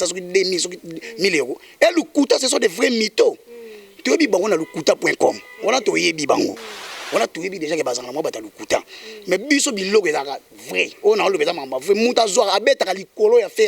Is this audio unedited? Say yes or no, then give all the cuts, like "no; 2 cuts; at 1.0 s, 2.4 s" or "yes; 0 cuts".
yes; 0 cuts